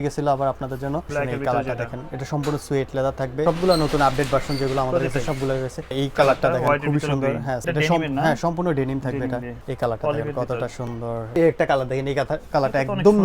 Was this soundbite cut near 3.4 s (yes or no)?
yes